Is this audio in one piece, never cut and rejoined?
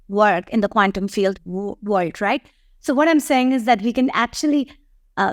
yes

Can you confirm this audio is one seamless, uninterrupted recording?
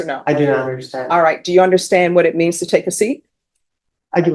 yes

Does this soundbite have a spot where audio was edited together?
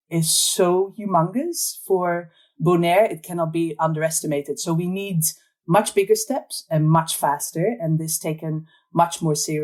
no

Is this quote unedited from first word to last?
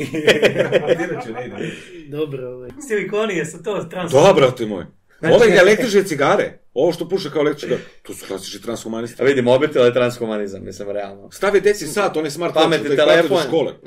no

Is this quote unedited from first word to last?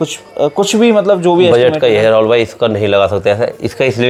yes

